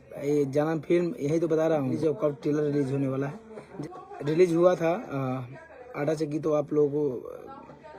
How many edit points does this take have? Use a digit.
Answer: 2